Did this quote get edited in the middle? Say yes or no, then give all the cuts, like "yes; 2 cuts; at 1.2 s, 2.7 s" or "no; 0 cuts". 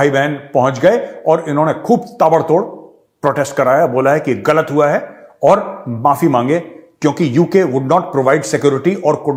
no; 0 cuts